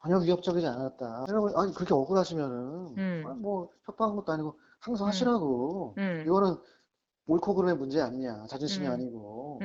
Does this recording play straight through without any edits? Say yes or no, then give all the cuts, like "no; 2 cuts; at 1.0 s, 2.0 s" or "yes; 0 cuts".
no; 1 cut; at 1.2 s